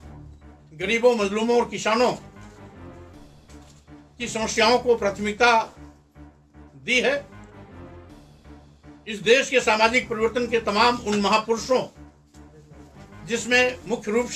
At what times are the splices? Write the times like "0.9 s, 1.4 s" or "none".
2.2 s, 4.2 s, 7.3 s, 9.0 s